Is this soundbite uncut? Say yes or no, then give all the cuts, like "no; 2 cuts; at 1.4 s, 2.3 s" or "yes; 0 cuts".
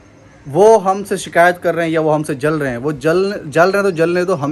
yes; 0 cuts